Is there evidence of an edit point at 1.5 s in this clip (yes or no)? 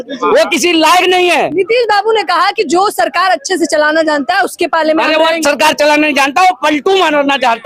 no